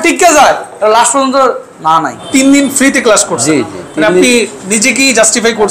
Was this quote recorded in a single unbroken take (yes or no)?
no